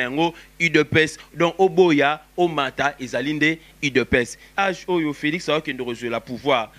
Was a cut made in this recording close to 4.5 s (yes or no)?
yes